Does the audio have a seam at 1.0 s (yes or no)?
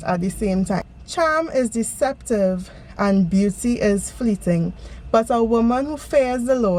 yes